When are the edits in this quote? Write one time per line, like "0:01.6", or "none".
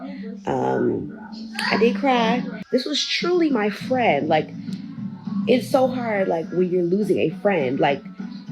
0:02.6